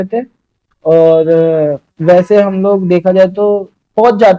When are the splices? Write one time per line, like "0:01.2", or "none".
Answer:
none